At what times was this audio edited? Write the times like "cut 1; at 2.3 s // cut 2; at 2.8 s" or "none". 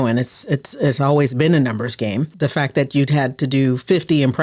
cut 1; at 2.3 s